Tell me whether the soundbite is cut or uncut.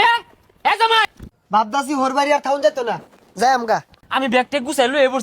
cut